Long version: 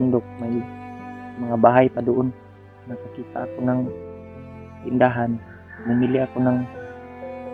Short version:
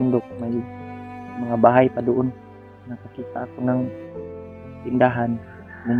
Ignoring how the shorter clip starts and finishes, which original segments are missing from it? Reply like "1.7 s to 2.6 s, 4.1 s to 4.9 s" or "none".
none